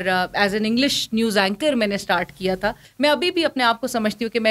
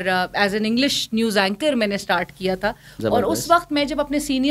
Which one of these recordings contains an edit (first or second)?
first